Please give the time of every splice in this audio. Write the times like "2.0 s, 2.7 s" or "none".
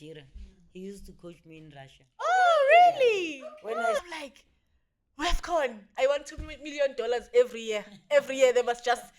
4.0 s, 5.8 s